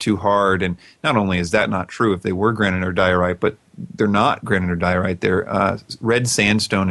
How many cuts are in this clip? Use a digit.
0